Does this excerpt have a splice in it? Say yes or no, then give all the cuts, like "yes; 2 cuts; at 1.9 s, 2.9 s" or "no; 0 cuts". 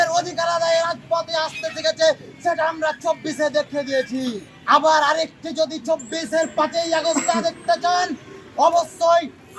no; 0 cuts